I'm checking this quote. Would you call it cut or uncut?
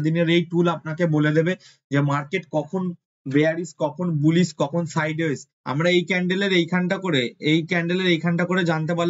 cut